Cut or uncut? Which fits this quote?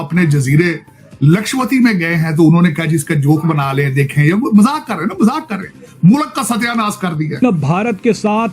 cut